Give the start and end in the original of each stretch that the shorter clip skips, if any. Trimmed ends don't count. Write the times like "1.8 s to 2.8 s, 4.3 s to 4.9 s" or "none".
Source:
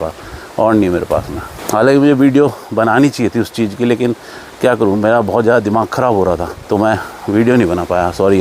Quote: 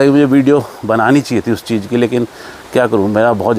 none